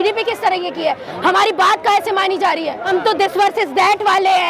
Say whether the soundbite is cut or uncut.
cut